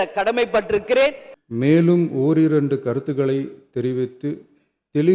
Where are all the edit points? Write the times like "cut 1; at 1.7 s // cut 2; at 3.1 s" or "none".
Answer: cut 1; at 1.3 s